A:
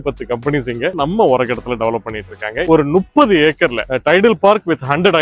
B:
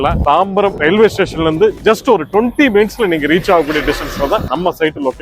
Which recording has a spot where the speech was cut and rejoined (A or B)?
A